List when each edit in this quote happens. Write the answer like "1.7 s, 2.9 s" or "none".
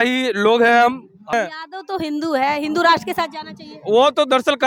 1.3 s